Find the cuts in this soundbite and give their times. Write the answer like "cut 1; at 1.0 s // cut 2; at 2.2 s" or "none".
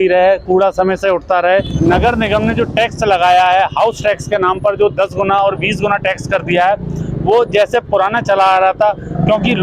cut 1; at 1.7 s